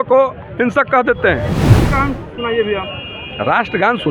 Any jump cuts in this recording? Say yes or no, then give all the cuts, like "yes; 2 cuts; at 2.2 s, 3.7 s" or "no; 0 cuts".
yes; 1 cut; at 1.8 s